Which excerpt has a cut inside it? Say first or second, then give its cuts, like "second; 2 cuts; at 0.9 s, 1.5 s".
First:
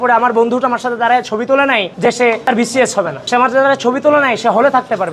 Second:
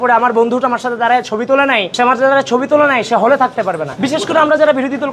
second; 2 cuts; at 1.9 s, 3.9 s